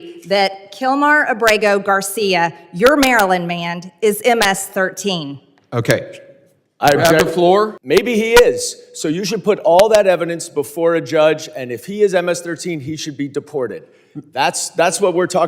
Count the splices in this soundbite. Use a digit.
1